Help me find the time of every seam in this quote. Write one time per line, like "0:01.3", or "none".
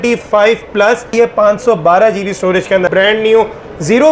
0:01.1
0:02.9